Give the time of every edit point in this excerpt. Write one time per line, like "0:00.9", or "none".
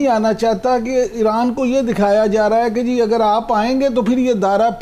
none